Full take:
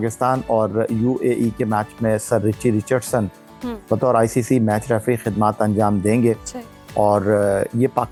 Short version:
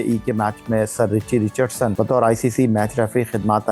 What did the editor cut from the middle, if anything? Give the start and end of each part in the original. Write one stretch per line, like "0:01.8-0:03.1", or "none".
0:03.3-0:03.9